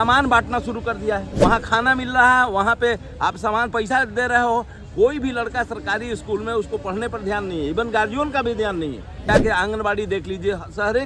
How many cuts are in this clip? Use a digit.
2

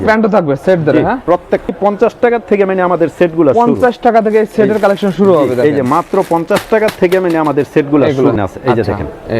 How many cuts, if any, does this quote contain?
2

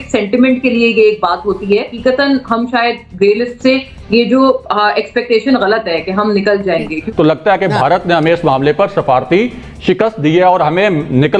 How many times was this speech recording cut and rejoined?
2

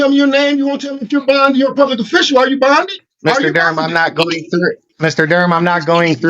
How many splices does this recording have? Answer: 2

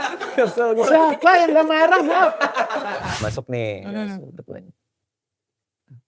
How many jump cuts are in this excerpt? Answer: 1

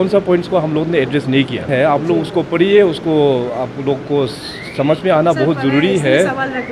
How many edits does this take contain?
1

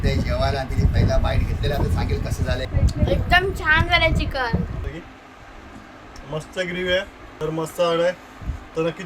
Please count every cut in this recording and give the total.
3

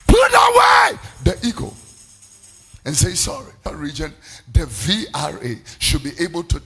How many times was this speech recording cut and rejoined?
1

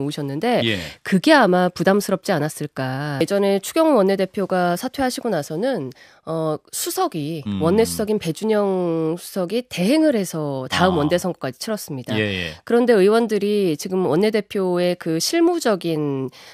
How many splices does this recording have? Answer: 1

